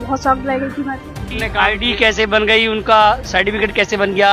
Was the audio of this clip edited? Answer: yes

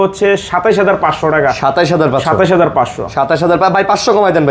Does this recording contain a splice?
no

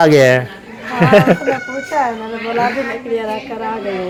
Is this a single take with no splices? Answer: yes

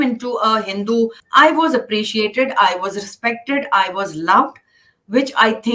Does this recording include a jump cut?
yes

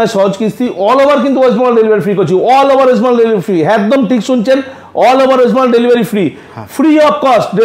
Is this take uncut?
yes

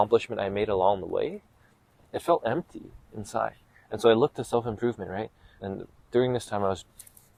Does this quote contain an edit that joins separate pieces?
no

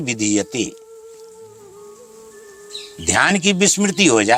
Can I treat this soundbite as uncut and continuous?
yes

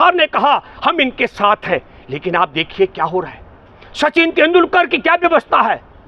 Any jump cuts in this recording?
no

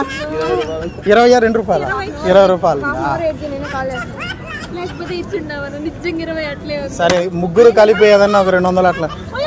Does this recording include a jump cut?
no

